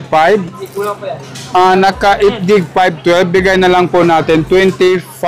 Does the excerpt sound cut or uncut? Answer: uncut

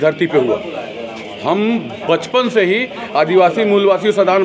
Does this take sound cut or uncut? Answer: uncut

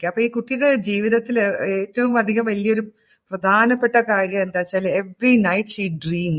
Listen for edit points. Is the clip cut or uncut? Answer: uncut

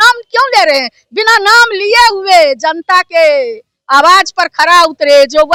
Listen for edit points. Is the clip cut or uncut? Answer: uncut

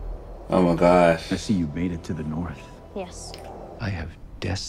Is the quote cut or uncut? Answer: cut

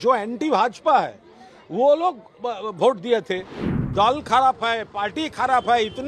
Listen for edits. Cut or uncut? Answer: cut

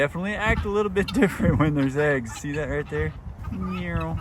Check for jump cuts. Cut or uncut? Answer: cut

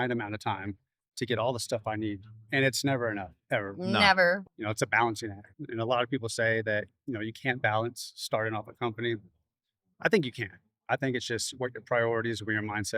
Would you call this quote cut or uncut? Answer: cut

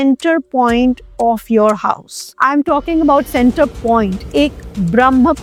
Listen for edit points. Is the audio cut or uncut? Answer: uncut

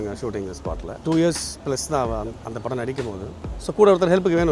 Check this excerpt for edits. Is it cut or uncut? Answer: cut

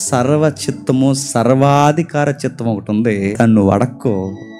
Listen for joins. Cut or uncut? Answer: cut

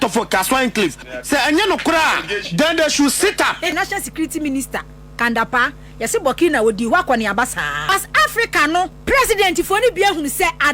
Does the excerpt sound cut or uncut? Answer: cut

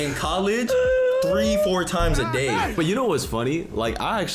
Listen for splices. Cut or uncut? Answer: cut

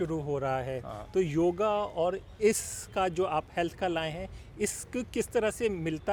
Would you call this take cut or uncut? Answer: uncut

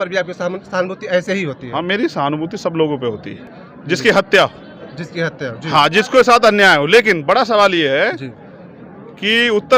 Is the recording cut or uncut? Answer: uncut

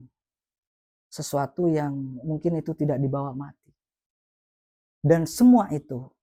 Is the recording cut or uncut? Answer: uncut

